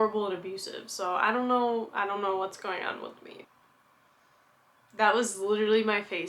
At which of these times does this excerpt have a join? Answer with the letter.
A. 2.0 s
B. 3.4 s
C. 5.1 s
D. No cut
B